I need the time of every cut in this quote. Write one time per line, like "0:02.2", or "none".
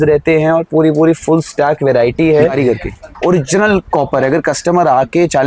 0:02.5